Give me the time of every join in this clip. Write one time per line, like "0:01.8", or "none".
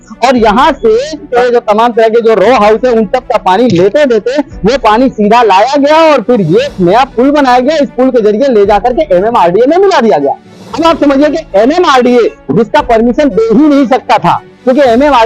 0:01.3